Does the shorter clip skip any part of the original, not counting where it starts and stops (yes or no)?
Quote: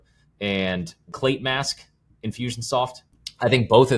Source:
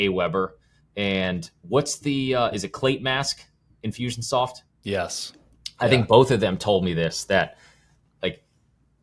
yes